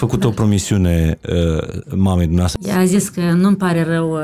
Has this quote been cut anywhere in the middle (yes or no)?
yes